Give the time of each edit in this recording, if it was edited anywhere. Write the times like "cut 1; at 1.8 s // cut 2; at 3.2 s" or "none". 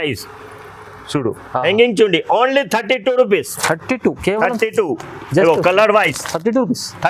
none